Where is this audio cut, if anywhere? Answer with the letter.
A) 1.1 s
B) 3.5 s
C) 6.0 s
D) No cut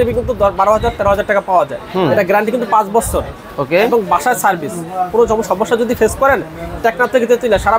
D